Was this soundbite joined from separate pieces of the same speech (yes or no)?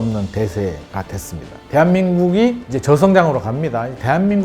yes